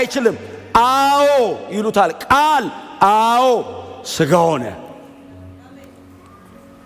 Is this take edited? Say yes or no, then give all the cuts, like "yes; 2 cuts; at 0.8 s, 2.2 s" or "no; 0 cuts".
no; 0 cuts